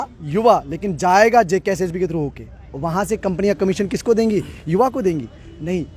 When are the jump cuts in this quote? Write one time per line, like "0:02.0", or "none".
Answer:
none